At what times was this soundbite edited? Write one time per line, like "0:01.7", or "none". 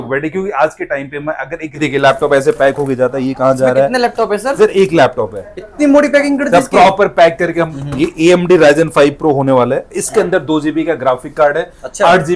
0:01.8
0:07.8